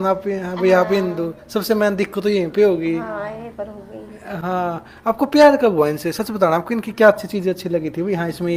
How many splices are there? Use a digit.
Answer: 0